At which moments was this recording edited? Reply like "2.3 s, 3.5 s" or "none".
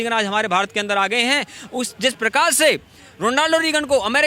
none